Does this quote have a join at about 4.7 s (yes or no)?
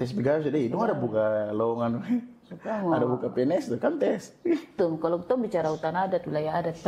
yes